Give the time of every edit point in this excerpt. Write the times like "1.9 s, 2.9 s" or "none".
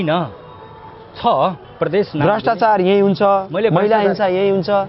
1.6 s